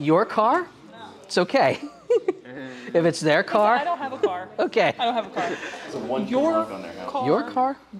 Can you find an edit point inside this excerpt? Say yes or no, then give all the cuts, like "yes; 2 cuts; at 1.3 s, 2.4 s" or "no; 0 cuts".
no; 0 cuts